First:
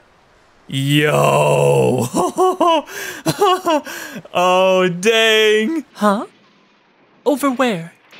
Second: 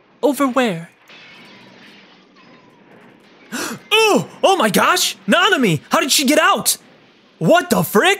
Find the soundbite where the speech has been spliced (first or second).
first